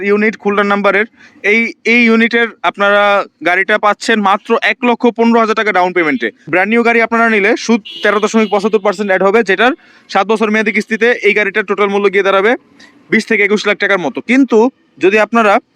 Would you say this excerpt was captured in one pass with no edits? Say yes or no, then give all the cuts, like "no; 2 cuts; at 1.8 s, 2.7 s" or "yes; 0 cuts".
no; 1 cut; at 6.4 s